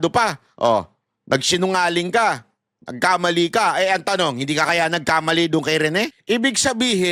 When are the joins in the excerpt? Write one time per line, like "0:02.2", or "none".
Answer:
0:06.2